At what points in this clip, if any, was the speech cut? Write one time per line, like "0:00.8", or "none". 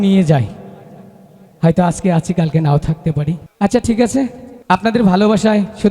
0:03.5
0:04.5